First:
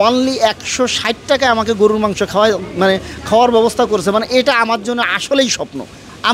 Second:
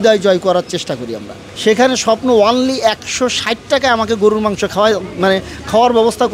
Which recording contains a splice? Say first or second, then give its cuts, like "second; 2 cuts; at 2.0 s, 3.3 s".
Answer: second; 1 cut; at 1.4 s